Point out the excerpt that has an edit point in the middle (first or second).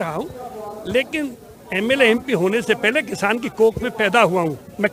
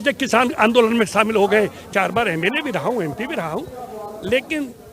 second